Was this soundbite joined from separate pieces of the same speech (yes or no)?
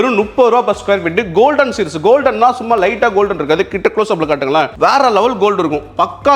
no